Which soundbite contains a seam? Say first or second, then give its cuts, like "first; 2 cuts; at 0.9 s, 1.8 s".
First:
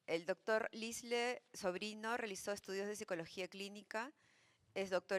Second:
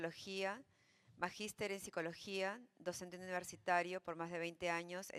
first; 1 cut; at 3.1 s